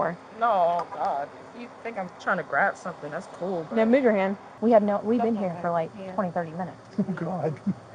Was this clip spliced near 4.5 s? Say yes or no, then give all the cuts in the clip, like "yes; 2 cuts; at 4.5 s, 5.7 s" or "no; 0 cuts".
yes; 1 cut; at 4.5 s